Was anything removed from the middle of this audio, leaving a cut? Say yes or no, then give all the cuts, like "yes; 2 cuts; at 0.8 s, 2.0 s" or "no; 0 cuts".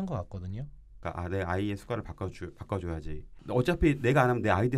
yes; 2 cuts; at 0.9 s, 3.4 s